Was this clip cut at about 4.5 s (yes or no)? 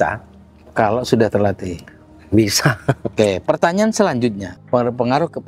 yes